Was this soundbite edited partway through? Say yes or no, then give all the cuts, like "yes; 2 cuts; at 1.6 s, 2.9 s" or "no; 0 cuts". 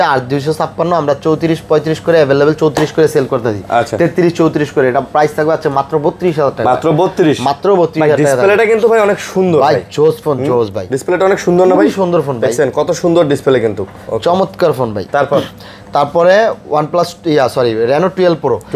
no; 0 cuts